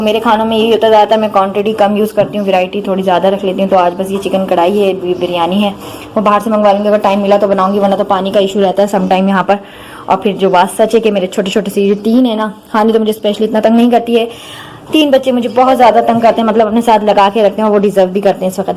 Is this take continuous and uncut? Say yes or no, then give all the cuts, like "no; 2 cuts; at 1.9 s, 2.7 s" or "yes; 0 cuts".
yes; 0 cuts